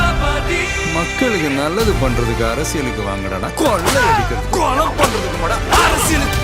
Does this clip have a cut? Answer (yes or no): no